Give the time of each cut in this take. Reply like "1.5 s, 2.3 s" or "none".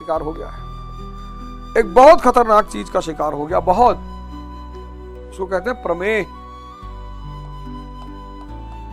4.0 s, 5.4 s, 6.3 s

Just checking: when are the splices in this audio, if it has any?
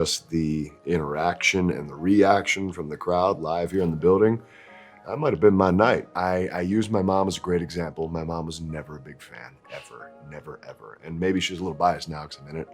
6.1 s

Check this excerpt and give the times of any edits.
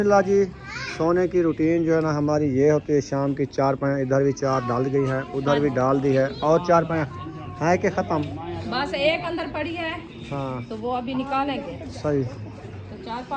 none

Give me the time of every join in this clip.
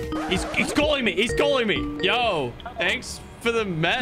2.0 s

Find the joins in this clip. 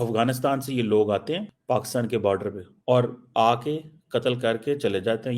1.5 s, 2.7 s

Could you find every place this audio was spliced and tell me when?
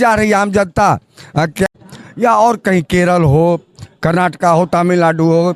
1.7 s

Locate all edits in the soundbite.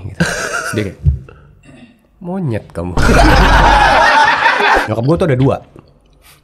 4.8 s

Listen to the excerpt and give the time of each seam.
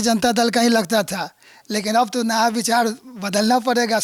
none

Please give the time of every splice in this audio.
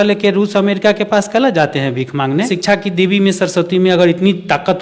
2.5 s

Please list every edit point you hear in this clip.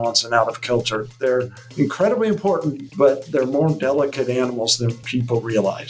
2.8 s, 5.0 s

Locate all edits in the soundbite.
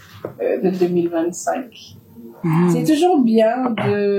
2.4 s

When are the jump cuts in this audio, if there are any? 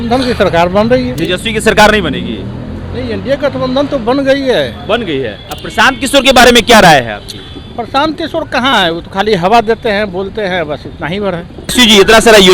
1.2 s, 5.4 s, 11.7 s

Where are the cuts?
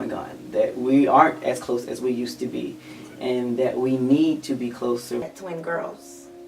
5.2 s

